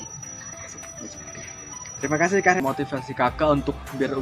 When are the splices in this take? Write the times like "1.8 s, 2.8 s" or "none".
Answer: 2.6 s